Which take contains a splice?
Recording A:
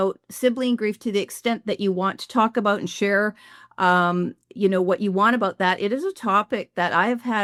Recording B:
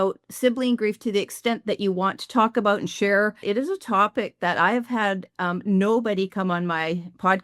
B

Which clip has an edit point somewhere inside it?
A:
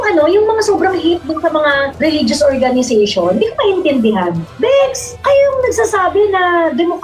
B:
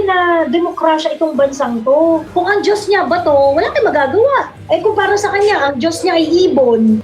B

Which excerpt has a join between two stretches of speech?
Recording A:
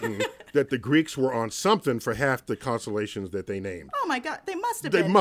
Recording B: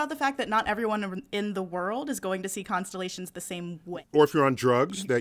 B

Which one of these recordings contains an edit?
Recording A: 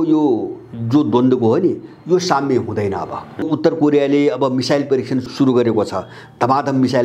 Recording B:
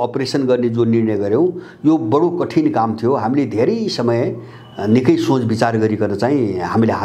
A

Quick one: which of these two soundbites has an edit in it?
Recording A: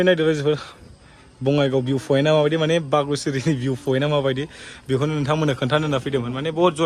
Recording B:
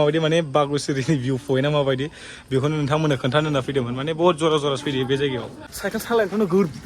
B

